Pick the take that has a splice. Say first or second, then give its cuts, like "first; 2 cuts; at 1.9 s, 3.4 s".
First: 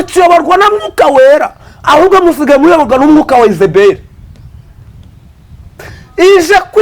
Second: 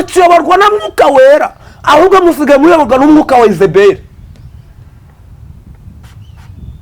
first; 1 cut; at 4.9 s